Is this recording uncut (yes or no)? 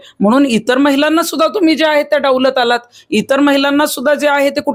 yes